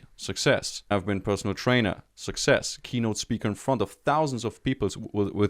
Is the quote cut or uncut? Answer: cut